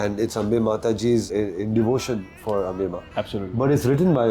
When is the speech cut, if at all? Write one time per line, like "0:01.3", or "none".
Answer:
0:01.3